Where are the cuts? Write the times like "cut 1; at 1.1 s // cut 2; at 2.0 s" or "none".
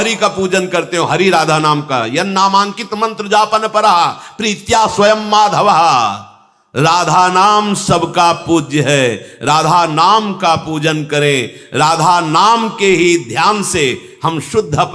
none